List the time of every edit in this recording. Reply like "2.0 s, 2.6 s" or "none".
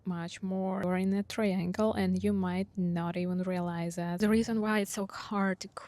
0.8 s, 4.2 s